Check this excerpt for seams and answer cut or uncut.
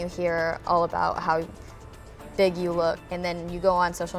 cut